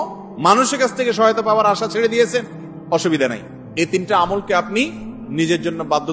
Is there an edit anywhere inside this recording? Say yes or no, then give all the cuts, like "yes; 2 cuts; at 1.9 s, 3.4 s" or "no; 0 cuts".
no; 0 cuts